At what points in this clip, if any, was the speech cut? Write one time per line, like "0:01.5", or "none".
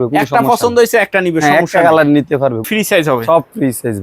0:02.7